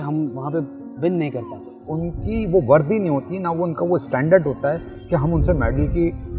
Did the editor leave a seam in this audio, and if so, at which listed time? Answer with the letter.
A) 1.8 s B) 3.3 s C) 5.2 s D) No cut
A